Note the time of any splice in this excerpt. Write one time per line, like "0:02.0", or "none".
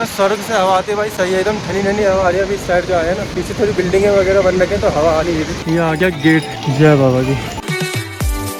none